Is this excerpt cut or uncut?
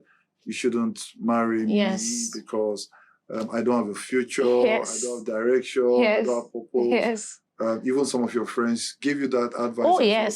uncut